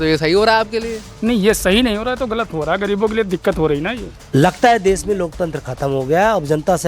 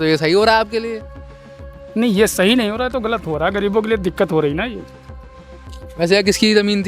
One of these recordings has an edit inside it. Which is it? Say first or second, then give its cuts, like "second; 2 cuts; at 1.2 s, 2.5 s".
first; 2 cuts; at 1.0 s, 4.2 s